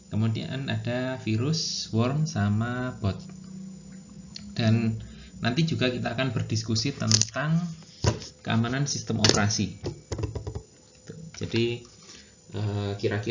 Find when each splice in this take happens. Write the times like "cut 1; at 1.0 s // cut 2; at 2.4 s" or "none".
none